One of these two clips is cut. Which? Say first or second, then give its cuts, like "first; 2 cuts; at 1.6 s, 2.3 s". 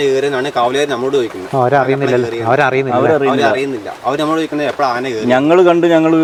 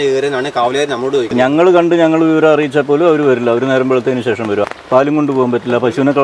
second; 2 cuts; at 1.3 s, 4.6 s